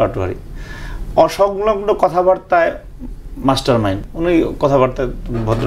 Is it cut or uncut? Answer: cut